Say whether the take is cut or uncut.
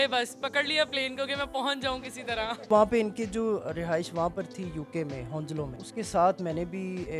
cut